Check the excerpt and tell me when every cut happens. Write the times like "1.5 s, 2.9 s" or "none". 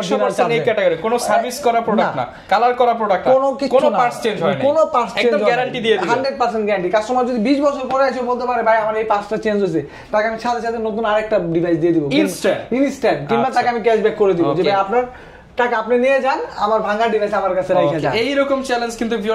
none